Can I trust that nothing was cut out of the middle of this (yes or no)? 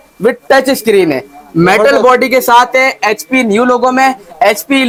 yes